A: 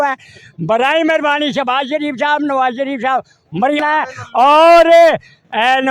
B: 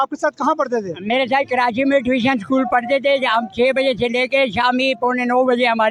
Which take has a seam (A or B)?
A